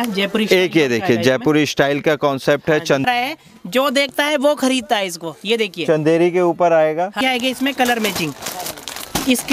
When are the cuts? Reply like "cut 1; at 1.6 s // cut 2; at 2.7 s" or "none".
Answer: cut 1; at 3.0 s // cut 2; at 7.2 s